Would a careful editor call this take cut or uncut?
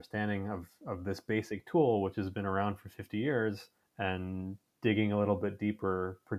uncut